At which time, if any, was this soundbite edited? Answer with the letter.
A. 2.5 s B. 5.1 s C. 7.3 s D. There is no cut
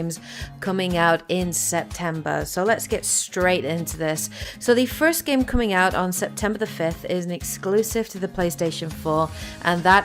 D